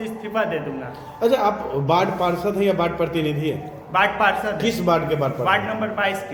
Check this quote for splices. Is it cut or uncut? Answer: uncut